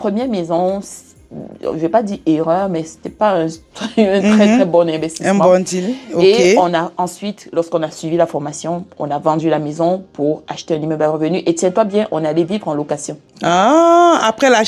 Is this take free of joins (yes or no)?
yes